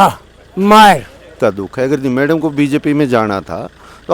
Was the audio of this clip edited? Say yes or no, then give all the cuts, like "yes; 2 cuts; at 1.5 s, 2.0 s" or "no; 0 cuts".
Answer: yes; 1 cut; at 1.3 s